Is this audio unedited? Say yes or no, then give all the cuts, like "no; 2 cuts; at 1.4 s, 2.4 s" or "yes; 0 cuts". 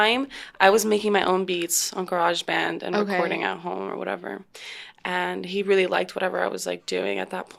yes; 0 cuts